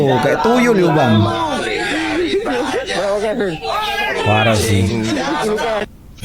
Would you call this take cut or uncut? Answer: uncut